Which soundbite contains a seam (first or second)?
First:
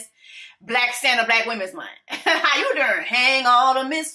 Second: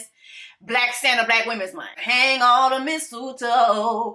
second